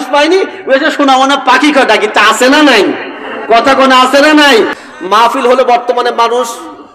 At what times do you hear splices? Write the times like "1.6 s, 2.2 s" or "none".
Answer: 4.8 s

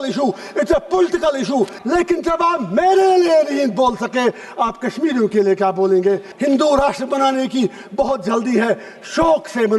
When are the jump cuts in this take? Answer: 1.8 s, 6.3 s

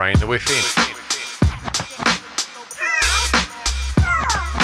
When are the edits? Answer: none

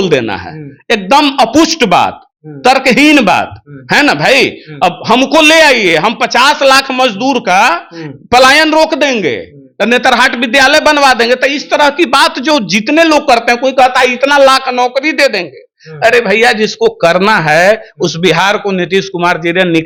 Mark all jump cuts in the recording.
none

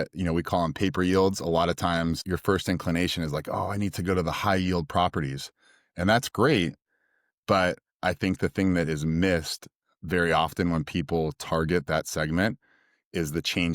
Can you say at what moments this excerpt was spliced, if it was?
2.2 s

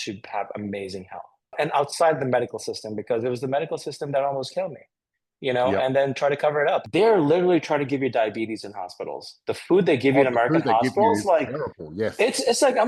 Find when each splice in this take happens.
1.5 s, 6.9 s

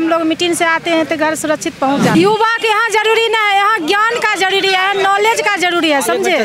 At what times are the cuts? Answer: 2.1 s

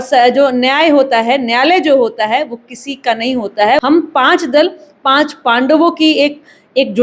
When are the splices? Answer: 3.8 s

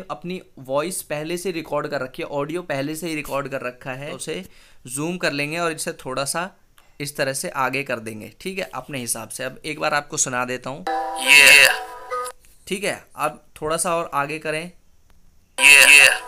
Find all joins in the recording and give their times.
4.2 s

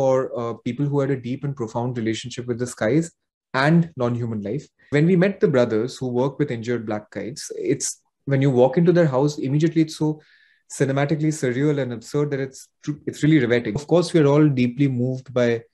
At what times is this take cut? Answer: 4.7 s, 13.8 s

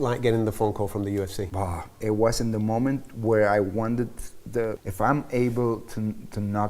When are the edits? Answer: 1.4 s, 4.8 s

